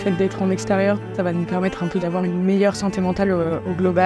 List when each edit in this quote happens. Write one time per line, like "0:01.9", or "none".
0:01.1